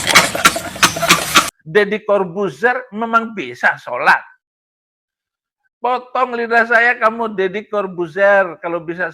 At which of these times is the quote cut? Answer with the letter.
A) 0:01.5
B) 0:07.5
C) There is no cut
A